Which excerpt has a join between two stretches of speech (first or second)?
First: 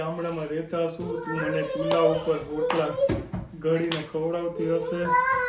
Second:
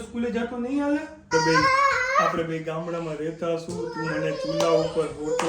second